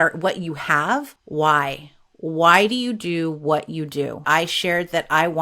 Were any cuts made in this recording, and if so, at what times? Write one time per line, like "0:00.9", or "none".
0:01.2
0:04.2